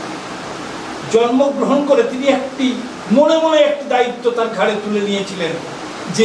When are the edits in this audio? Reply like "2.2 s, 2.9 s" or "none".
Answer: none